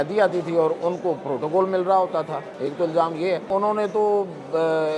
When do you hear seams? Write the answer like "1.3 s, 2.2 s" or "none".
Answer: 2.4 s, 3.5 s